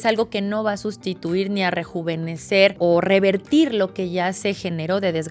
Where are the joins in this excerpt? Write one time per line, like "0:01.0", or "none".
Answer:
0:02.8